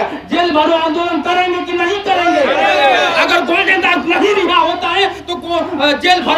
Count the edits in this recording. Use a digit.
0